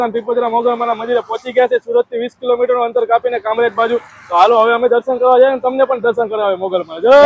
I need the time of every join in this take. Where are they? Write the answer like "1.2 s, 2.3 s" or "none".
none

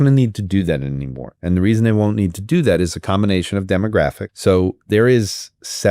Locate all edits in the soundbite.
4.3 s

